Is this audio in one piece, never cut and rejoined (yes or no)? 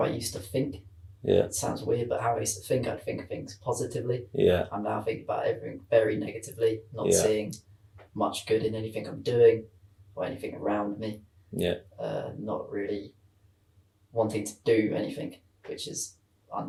yes